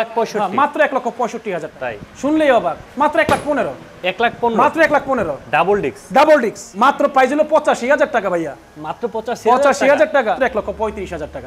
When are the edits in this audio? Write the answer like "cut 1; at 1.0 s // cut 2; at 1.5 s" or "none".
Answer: cut 1; at 1.7 s // cut 2; at 6.6 s // cut 3; at 10.4 s